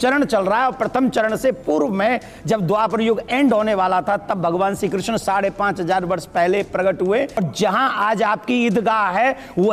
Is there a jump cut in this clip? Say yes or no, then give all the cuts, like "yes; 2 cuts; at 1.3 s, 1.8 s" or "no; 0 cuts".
yes; 1 cut; at 7.4 s